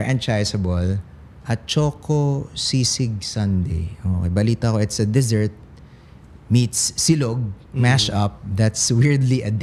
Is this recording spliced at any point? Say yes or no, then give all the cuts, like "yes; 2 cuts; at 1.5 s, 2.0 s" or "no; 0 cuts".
no; 0 cuts